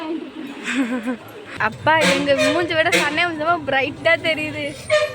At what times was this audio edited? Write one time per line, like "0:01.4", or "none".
0:01.4